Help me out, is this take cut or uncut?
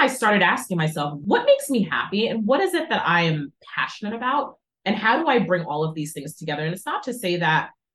cut